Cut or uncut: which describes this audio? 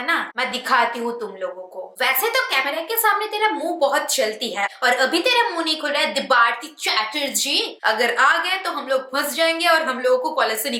cut